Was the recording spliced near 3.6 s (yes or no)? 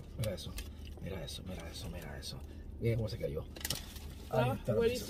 yes